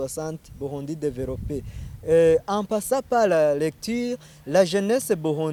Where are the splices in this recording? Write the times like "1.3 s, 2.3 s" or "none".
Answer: none

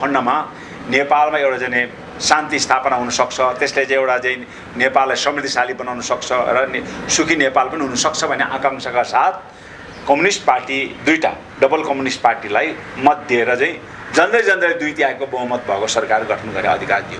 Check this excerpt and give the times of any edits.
none

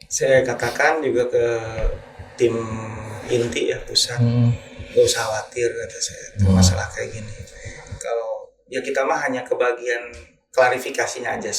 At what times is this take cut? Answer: none

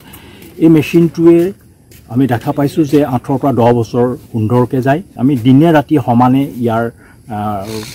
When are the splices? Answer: 5.1 s

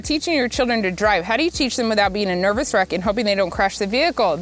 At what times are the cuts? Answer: none

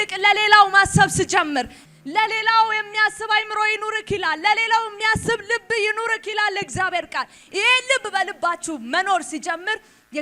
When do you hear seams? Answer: 1.8 s

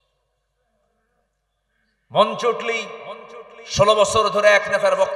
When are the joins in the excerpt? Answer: none

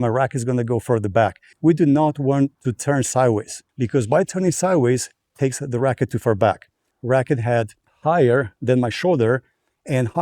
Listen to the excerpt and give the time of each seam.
1.5 s, 2.7 s, 3.6 s, 6.9 s, 7.8 s

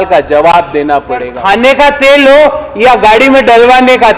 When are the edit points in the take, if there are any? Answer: 1.3 s

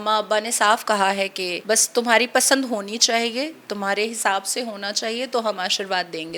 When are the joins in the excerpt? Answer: 1.5 s

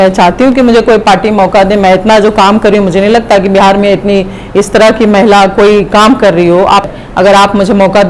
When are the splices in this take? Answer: 6.9 s

